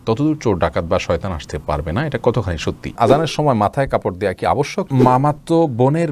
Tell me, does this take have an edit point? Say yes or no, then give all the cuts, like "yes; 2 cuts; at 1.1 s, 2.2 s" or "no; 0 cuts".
yes; 2 cuts; at 2.9 s, 4.9 s